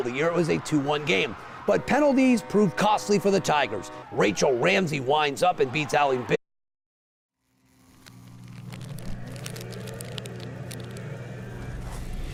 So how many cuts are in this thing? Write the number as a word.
zero